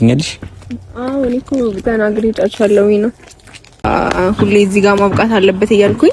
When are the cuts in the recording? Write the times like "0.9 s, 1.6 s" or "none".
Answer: 3.8 s